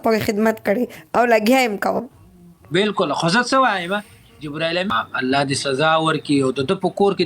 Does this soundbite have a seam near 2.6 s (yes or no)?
no